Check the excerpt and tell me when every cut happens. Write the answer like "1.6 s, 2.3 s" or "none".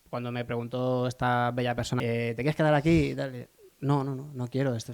2.0 s